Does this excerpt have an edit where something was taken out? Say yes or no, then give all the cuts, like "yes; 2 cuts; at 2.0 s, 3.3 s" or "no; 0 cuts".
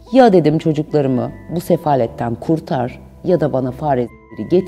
no; 0 cuts